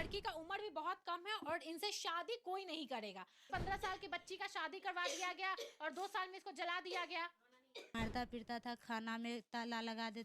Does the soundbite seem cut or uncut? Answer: cut